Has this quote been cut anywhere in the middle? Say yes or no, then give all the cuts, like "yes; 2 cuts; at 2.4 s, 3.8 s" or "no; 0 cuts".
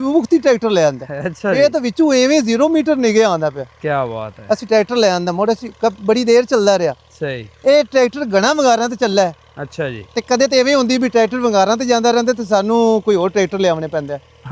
no; 0 cuts